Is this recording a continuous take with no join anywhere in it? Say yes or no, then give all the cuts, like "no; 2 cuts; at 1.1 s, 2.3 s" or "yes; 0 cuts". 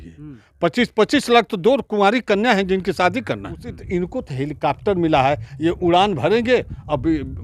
no; 1 cut; at 3.7 s